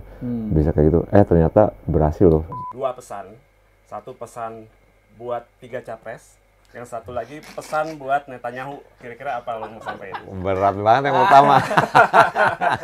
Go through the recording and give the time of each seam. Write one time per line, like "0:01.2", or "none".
0:02.5